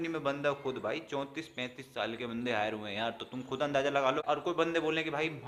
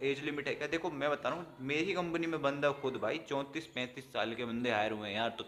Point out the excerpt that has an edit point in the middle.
first; 1 cut; at 4.2 s

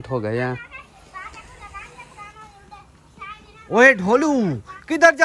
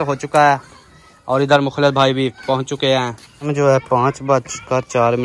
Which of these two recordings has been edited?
second; 1 cut; at 3.5 s

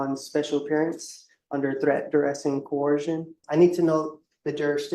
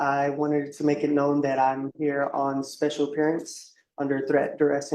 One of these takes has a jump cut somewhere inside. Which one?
first; 1 cut; at 3.4 s

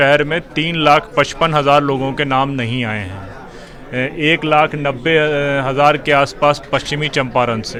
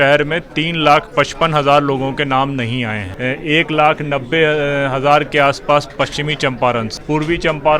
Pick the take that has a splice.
second; 2 cuts; at 3.1 s, 6.9 s

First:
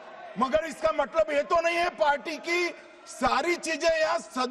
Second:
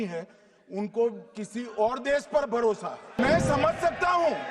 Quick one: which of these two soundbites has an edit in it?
second; 1 cut; at 3.2 s

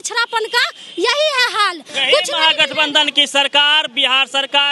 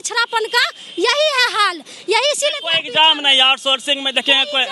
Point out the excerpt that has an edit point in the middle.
first; 1 cut; at 1.9 s

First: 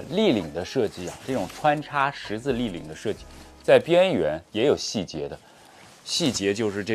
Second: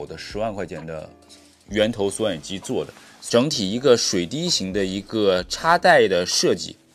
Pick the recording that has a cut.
second; 1 cut; at 3.2 s

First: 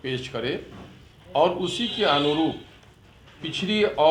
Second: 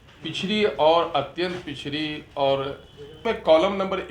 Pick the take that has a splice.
second; 1 cut; at 3.2 s

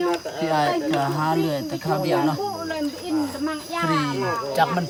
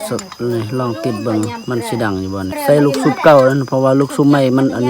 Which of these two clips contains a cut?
second; 1 cut; at 2.5 s

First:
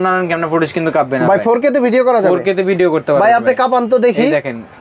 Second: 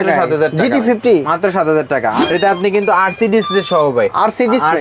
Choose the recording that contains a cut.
second; 1 cut; at 2.2 s

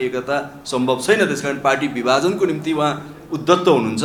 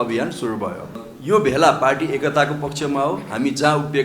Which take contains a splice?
second; 1 cut; at 1.1 s

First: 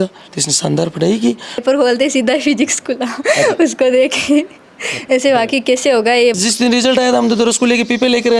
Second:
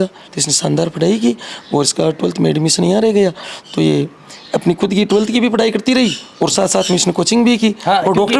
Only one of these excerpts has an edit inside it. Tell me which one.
first; 2 cuts; at 1.6 s, 6.4 s

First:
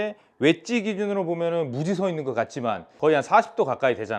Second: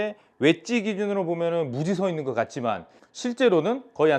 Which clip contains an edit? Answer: first; 1 cut; at 2.9 s

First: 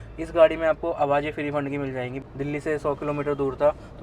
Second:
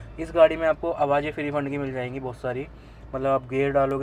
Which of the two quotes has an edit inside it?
first; 1 cut; at 2.2 s

